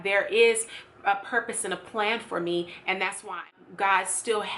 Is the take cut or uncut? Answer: cut